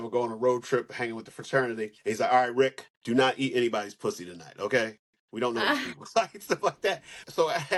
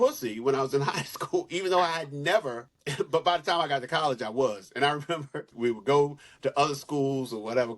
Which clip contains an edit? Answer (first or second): second